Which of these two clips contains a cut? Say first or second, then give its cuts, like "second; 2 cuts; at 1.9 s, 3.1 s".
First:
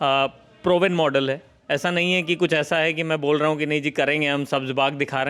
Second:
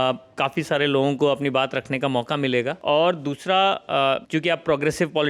second; 2 cuts; at 2.8 s, 4.2 s